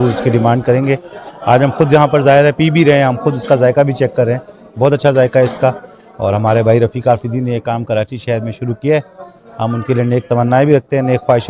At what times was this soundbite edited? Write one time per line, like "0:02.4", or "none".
none